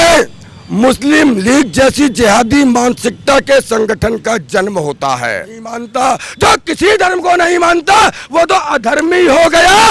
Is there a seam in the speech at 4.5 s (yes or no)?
no